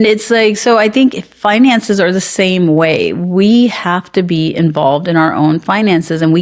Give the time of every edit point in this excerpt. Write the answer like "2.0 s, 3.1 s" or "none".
none